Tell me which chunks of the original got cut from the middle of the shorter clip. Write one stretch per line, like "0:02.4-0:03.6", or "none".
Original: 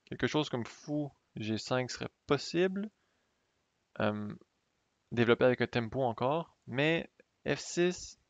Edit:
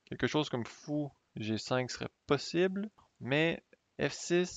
0:03.1-0:06.6